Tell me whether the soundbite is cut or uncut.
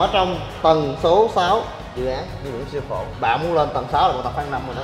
uncut